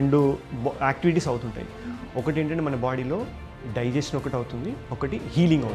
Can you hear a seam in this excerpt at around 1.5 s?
no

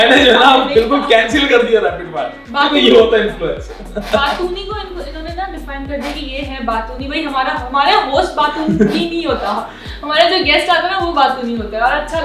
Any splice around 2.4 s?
no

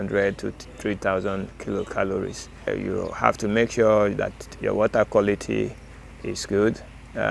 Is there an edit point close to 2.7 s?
yes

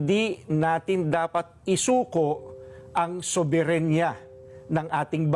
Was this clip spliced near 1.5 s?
yes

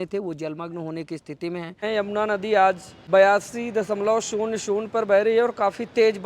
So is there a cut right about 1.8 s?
yes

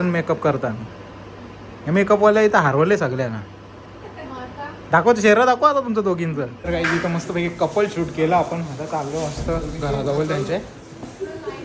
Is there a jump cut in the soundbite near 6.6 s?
yes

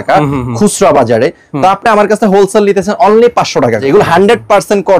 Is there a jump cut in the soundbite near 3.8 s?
yes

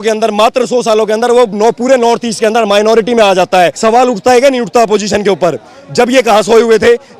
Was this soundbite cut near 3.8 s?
yes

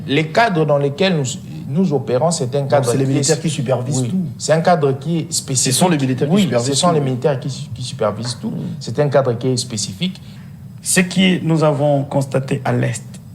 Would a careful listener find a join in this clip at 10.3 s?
yes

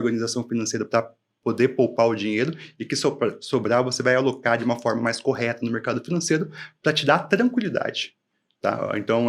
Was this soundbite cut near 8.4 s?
no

